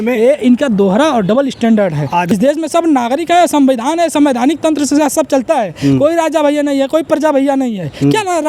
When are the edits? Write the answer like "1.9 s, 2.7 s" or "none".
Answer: 2.3 s